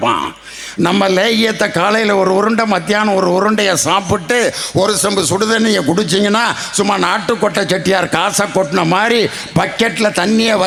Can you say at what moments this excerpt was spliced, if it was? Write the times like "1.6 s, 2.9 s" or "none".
none